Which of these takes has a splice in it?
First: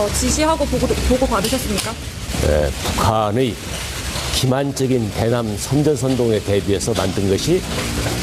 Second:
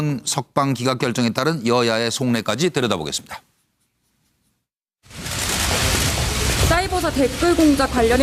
first; 1 cut; at 6.3 s

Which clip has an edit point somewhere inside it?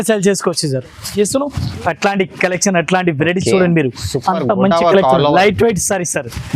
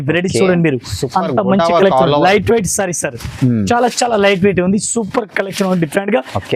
first; 1 cut; at 1.0 s

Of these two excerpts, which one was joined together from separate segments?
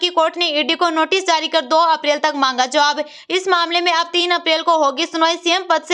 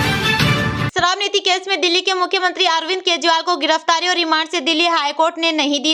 second; 1 cut; at 0.9 s

